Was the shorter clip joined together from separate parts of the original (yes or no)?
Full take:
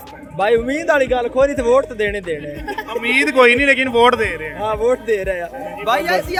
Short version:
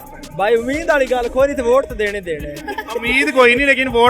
no